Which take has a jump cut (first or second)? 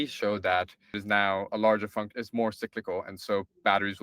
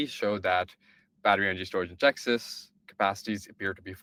first